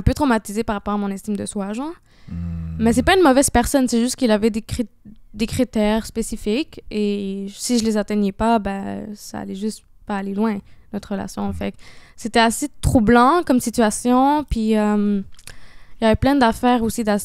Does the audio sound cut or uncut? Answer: uncut